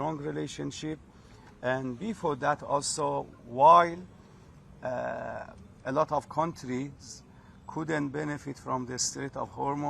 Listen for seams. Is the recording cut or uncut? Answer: uncut